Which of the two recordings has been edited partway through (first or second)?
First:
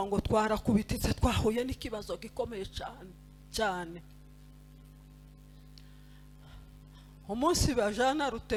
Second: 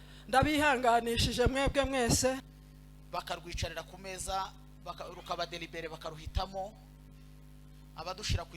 second